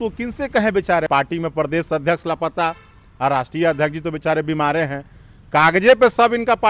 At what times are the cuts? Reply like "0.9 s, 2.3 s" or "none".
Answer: 1.1 s

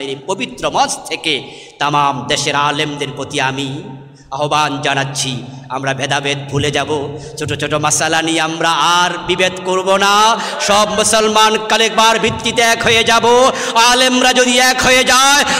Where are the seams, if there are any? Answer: none

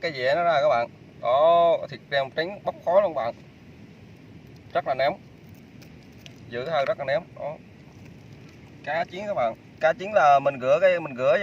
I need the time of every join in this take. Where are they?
4.0 s

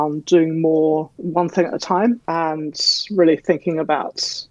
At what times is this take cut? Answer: none

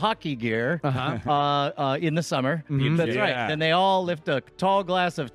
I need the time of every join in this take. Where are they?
3.0 s

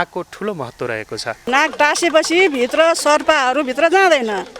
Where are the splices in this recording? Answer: 1.4 s

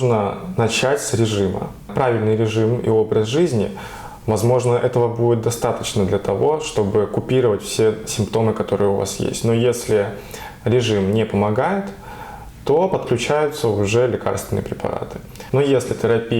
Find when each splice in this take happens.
1.9 s, 15.4 s

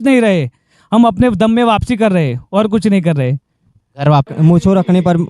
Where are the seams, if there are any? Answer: 4.3 s

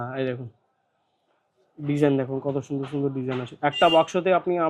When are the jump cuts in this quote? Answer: none

